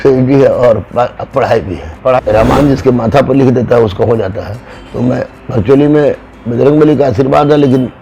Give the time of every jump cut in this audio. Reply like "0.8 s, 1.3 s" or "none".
2.2 s